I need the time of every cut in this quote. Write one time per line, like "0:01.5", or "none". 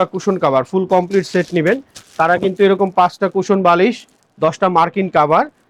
none